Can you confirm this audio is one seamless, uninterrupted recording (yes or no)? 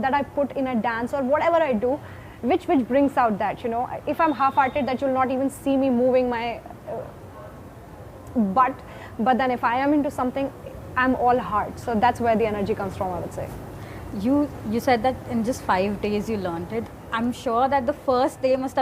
yes